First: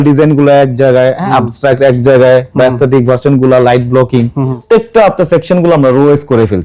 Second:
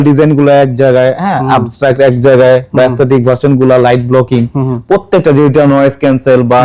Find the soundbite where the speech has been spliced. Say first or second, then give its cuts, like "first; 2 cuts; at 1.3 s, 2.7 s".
first; 2 cuts; at 1.2 s, 4.6 s